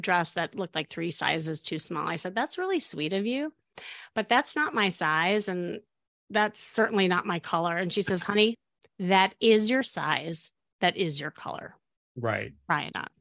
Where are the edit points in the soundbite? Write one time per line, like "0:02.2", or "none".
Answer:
none